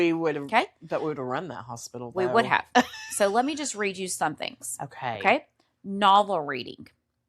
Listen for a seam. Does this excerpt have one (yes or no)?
no